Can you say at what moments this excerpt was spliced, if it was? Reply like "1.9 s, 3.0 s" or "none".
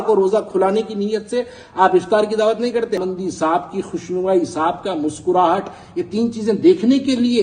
3.0 s